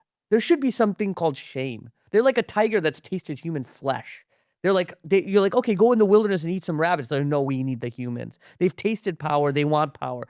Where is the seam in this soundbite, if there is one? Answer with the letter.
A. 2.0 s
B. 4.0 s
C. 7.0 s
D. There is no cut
A